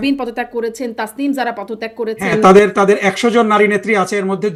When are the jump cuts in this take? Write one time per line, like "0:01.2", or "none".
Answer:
none